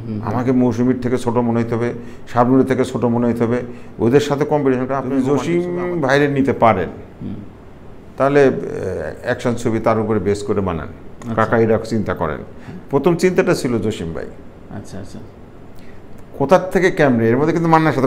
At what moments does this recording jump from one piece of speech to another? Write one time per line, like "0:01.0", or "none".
0:05.1